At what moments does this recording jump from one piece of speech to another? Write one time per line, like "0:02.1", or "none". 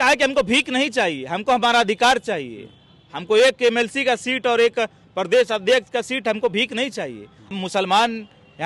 0:07.5